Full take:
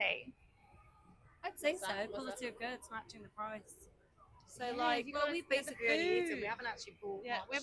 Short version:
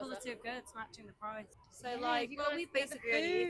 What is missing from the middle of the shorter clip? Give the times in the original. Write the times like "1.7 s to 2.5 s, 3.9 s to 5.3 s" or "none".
3.8 s to 4.4 s